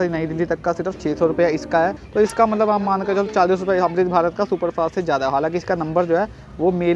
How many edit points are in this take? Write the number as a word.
one